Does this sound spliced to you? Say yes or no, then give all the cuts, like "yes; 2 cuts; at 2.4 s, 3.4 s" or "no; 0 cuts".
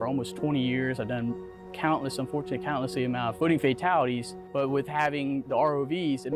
yes; 2 cuts; at 3.3 s, 4.4 s